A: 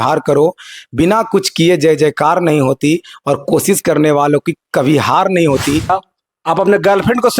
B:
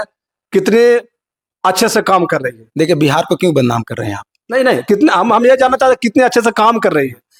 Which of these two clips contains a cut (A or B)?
A